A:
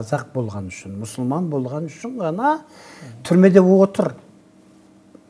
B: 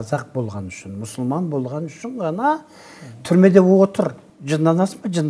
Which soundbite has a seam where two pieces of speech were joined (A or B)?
B